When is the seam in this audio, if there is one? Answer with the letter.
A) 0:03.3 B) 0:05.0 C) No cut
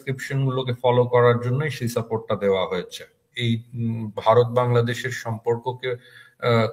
A